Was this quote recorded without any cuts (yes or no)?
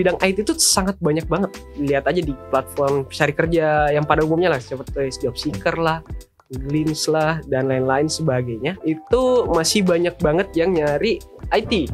no